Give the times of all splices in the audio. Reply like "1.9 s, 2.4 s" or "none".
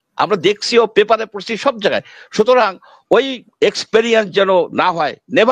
none